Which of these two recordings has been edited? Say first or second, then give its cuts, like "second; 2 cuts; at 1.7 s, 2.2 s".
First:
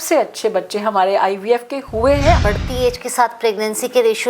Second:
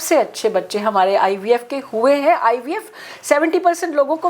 first; 1 cut; at 2.4 s